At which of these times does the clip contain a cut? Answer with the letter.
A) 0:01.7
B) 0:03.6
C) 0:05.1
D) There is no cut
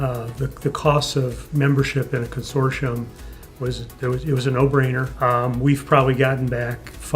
C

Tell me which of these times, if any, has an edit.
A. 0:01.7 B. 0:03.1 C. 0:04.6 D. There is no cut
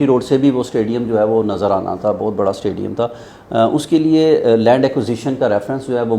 D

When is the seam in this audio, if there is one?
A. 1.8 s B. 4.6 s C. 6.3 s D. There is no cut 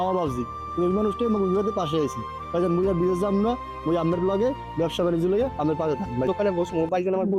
C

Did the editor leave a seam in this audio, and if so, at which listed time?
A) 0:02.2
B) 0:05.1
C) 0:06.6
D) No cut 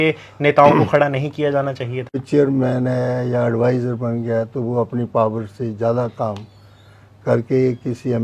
A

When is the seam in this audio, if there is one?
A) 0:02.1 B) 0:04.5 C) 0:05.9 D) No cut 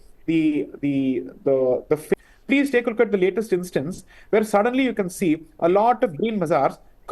A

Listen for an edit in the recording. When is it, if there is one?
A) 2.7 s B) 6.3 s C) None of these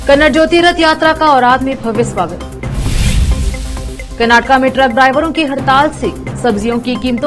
C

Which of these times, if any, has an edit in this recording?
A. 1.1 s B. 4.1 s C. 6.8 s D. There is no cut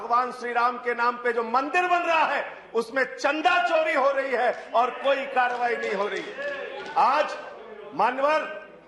D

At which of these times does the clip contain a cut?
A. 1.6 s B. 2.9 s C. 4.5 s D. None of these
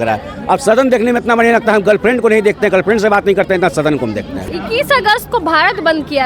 C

